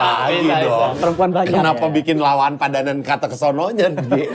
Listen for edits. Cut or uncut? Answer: cut